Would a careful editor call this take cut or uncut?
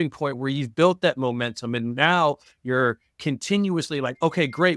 uncut